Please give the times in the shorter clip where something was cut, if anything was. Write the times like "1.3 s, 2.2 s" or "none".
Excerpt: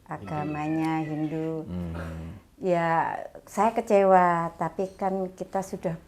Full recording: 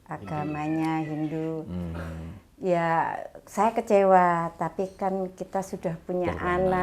none